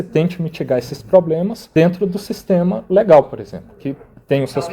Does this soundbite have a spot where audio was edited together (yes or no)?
yes